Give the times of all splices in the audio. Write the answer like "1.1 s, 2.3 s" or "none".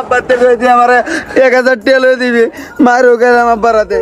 none